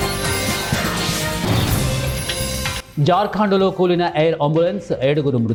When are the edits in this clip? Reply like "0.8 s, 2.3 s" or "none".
none